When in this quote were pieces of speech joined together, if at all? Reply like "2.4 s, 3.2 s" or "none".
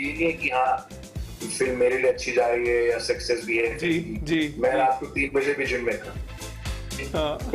6.6 s